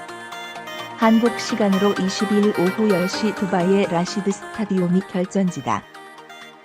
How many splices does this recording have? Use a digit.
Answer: 2